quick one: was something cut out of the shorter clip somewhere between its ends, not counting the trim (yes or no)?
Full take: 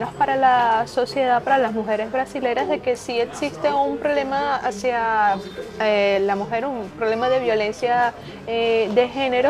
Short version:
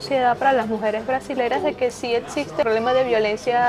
yes